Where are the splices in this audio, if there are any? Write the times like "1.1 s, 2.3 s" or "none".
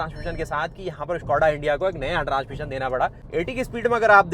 3.2 s